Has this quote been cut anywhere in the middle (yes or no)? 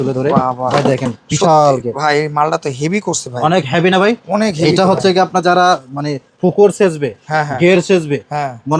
no